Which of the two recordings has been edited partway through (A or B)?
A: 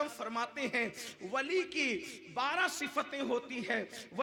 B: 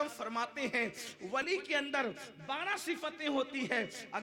B